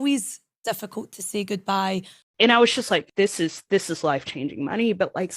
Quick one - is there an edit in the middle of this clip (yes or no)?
yes